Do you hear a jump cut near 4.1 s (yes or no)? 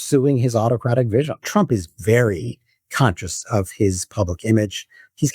no